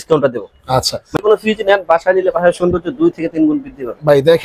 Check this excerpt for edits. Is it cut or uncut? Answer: cut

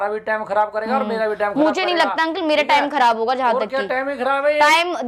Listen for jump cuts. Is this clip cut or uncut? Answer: uncut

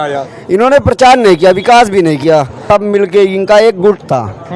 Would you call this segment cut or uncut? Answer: cut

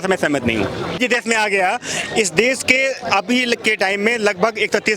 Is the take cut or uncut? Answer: cut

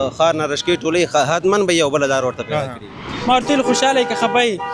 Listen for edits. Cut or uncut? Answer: cut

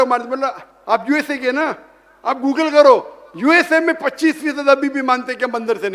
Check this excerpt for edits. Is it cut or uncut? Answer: uncut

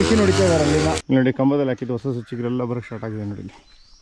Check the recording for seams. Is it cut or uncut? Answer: cut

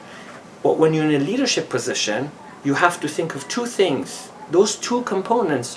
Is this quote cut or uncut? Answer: uncut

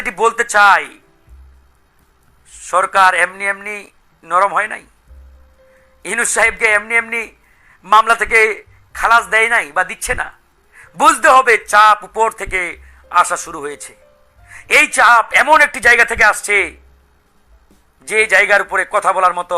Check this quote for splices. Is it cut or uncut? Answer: uncut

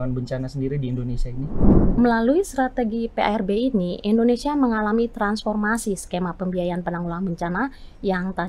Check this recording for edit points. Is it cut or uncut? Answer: cut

